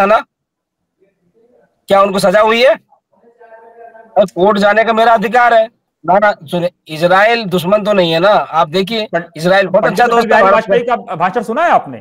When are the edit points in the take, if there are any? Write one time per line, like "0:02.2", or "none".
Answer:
0:05.9